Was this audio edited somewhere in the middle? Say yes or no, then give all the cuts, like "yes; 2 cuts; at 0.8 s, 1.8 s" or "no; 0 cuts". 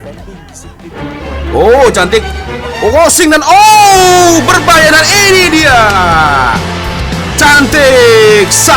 no; 0 cuts